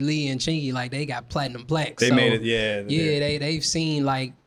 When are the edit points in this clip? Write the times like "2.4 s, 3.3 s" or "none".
none